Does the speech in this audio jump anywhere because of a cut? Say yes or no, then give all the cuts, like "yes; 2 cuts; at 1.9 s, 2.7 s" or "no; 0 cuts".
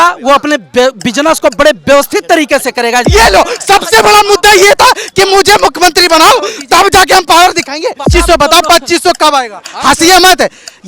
yes; 2 cuts; at 3.1 s, 8.1 s